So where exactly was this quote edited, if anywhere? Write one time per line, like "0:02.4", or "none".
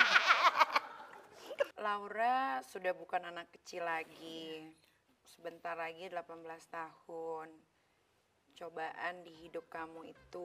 0:01.7